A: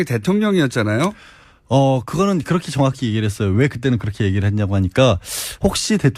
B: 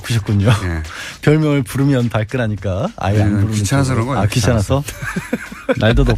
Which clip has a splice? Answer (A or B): A